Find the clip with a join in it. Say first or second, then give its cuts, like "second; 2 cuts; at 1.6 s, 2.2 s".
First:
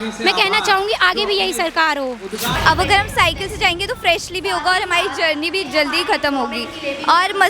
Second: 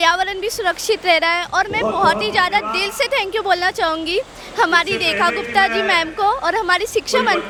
first; 1 cut; at 2.6 s